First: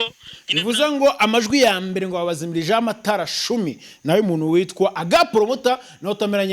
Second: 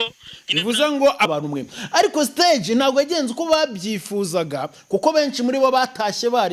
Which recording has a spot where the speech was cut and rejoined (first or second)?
second